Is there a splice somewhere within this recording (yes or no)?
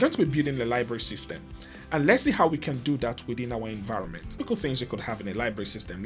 yes